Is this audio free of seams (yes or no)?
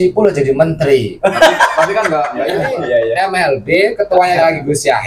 no